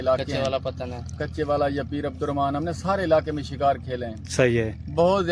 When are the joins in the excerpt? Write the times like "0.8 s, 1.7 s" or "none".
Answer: none